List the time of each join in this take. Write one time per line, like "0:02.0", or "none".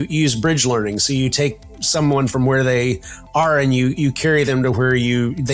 none